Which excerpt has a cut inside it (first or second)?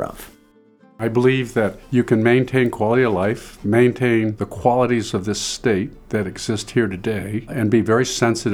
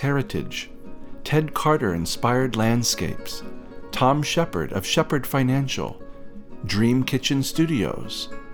first